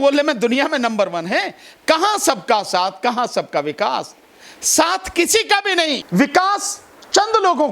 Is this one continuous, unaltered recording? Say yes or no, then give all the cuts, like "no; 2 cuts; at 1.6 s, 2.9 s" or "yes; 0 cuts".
no; 1 cut; at 6.0 s